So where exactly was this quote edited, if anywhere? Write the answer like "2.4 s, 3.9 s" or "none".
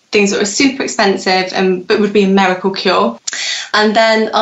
3.3 s